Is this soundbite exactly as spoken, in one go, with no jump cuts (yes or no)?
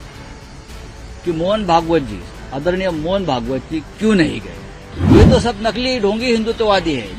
no